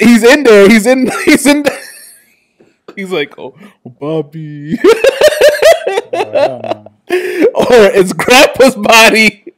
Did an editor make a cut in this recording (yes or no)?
no